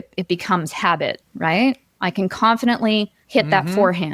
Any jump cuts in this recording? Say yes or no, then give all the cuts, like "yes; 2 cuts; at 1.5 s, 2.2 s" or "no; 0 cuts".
yes; 2 cuts; at 1.3 s, 3.2 s